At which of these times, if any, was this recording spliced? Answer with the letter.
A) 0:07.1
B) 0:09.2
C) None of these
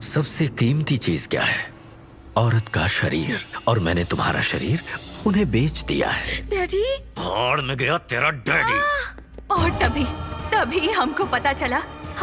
C